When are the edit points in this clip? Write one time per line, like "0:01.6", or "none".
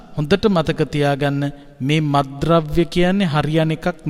none